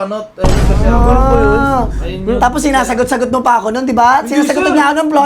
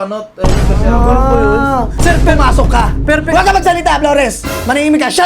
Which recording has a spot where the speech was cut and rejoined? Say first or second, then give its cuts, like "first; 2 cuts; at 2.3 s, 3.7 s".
second; 1 cut; at 1.9 s